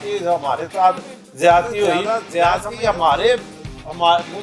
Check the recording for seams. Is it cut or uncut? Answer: cut